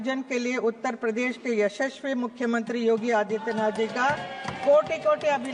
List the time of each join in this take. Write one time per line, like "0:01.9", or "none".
none